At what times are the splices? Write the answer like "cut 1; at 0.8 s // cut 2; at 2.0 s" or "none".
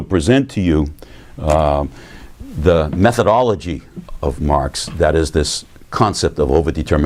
none